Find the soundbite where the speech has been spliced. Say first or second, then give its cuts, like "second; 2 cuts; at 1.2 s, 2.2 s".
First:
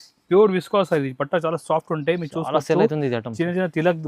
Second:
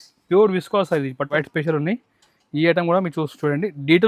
second; 1 cut; at 1.3 s